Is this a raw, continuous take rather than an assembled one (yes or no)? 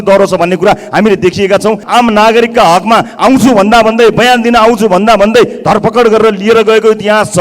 no